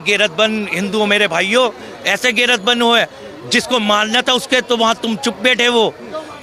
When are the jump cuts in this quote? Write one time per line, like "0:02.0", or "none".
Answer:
none